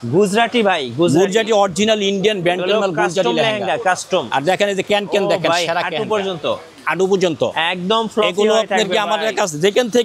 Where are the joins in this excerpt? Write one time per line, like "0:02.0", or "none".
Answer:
none